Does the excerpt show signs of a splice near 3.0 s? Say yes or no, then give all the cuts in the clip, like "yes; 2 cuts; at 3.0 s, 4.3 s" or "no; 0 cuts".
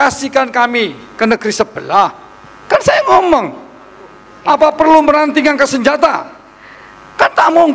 no; 1 cut; at 4.3 s